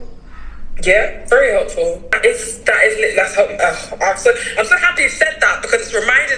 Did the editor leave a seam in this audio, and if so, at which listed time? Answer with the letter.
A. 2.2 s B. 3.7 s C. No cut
A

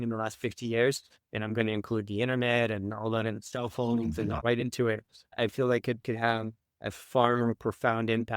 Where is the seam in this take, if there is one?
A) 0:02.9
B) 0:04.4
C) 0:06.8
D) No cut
B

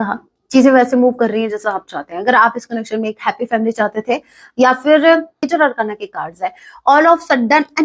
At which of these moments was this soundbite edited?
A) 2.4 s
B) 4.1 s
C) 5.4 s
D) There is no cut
C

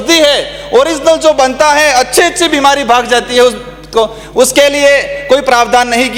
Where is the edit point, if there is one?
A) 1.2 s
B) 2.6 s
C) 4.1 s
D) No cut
D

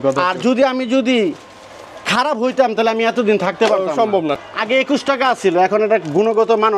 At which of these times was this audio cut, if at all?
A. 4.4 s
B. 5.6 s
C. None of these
A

